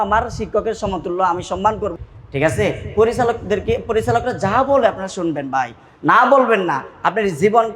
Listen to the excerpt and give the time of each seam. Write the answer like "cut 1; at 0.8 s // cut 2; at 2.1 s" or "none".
cut 1; at 2.0 s